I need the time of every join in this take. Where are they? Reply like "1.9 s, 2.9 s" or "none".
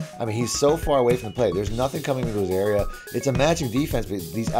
none